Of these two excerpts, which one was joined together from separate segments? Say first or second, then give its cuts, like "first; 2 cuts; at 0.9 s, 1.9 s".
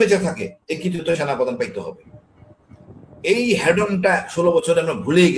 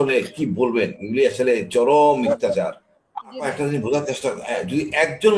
second; 1 cut; at 3.4 s